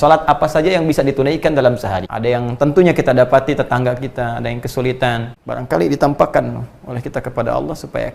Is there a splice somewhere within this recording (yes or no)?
yes